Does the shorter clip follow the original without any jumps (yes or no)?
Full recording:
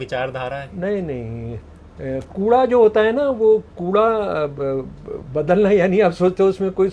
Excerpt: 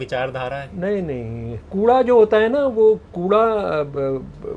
no